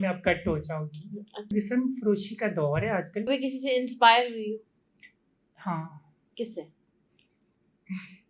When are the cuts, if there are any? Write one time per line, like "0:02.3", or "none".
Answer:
0:01.5
0:03.3